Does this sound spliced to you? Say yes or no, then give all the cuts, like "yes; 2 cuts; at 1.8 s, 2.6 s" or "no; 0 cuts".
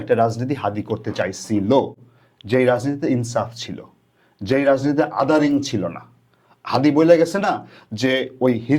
no; 0 cuts